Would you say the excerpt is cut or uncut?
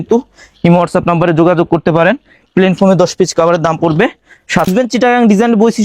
cut